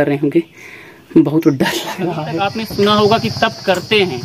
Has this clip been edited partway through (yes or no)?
yes